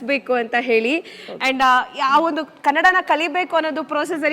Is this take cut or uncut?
uncut